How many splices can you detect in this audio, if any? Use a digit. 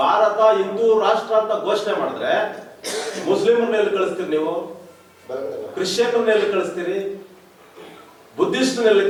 0